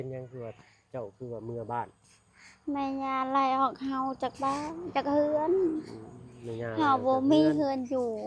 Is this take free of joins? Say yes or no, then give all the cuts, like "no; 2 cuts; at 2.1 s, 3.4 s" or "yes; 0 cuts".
yes; 0 cuts